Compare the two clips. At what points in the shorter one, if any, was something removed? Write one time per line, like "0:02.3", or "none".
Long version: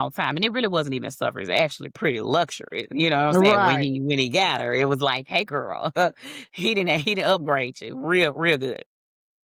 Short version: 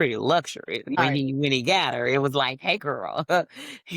0:01.0

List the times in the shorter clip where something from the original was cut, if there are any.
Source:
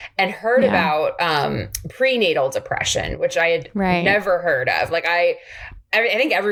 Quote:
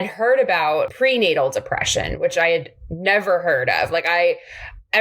0:00.9

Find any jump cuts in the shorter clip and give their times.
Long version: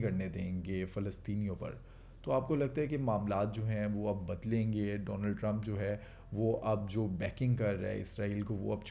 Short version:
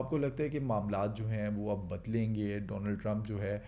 none

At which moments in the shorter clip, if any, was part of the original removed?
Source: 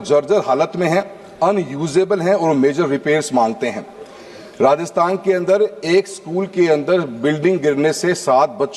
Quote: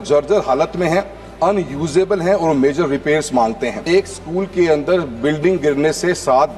0:03.8

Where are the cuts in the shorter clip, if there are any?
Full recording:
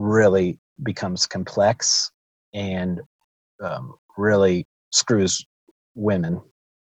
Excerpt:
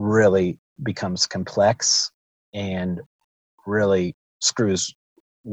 0:03.4

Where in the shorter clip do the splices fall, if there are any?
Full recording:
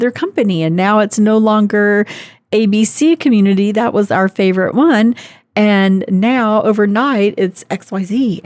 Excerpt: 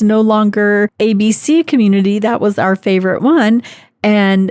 0:00.9

